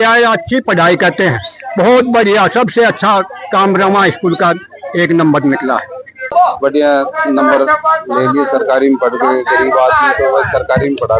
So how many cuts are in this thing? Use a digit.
1